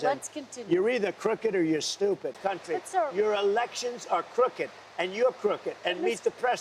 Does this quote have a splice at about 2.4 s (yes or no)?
yes